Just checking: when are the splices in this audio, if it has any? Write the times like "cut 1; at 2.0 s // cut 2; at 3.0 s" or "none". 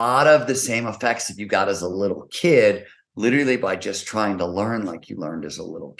none